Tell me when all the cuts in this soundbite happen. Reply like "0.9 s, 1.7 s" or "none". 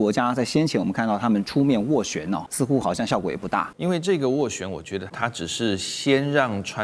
2.5 s, 3.7 s, 5.1 s